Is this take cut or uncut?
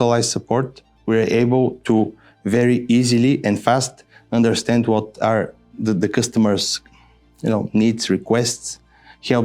uncut